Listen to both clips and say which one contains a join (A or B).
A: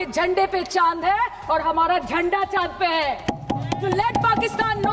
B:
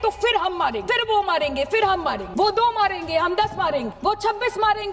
B